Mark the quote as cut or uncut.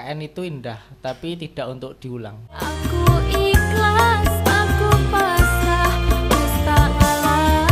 uncut